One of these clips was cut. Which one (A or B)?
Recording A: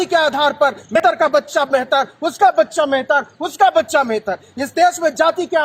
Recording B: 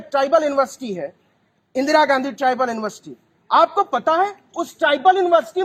A